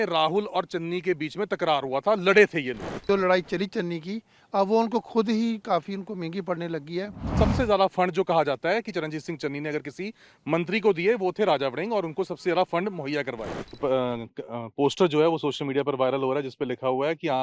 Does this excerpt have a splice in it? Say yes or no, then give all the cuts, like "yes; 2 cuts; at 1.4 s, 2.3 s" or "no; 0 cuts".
yes; 3 cuts; at 3.0 s, 7.3 s, 13.7 s